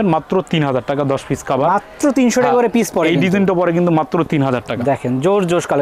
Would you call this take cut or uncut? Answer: uncut